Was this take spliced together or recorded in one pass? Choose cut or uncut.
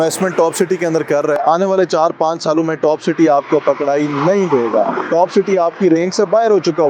uncut